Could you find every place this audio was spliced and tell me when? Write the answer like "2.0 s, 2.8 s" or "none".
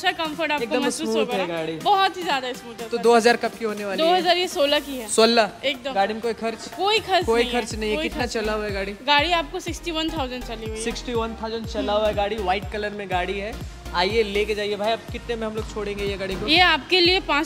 none